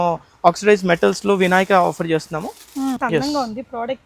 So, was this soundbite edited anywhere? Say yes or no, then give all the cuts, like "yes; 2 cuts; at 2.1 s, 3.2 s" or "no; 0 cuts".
yes; 1 cut; at 3.0 s